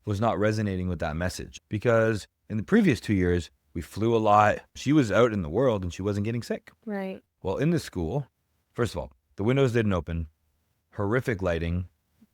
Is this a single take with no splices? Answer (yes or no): no